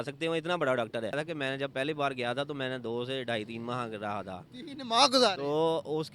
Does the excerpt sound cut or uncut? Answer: cut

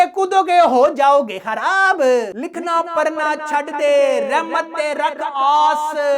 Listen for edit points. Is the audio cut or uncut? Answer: cut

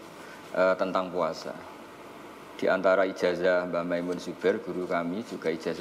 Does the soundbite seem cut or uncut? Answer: uncut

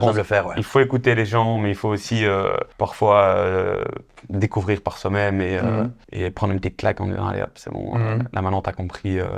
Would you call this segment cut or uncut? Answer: cut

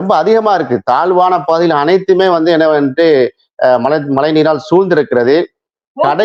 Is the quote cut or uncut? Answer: uncut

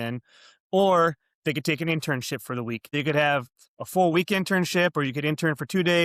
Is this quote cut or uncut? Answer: cut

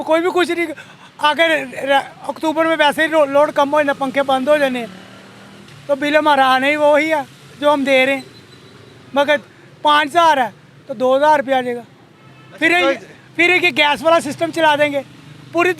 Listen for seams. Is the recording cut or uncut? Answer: uncut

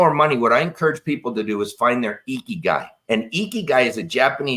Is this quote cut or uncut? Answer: cut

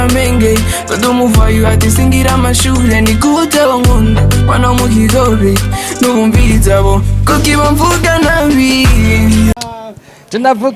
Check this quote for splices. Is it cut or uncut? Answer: cut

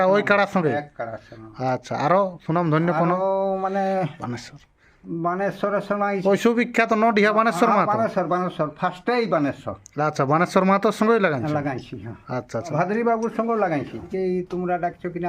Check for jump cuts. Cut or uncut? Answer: cut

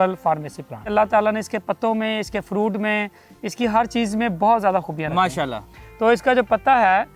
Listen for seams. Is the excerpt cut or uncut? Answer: cut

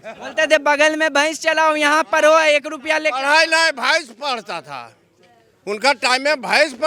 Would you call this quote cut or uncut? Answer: uncut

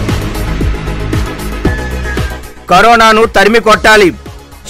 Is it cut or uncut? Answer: uncut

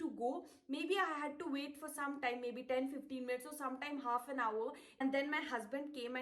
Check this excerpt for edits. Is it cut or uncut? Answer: cut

